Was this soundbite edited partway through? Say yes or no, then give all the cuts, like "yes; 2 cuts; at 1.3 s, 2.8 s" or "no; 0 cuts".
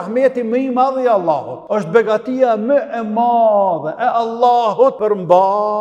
yes; 2 cuts; at 1.5 s, 5.0 s